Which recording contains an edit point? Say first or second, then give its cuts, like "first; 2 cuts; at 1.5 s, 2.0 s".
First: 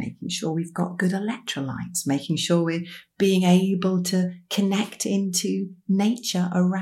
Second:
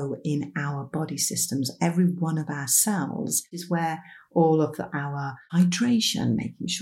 second; 2 cuts; at 3.6 s, 5.4 s